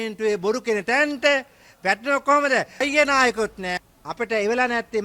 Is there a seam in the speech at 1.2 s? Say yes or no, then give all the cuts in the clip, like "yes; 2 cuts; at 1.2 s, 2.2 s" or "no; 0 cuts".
no; 2 cuts; at 2.8 s, 3.8 s